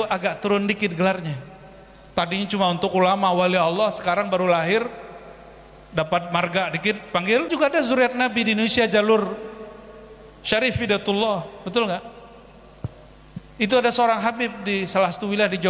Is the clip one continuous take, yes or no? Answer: no